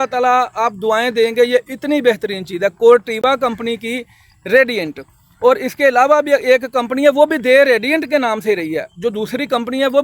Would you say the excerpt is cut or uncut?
uncut